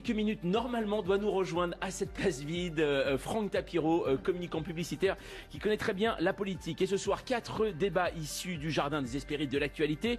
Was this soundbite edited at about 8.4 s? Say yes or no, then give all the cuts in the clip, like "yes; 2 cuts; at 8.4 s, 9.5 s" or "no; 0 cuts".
no; 1 cut; at 3.6 s